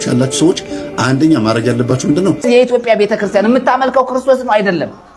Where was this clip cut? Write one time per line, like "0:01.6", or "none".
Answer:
0:02.4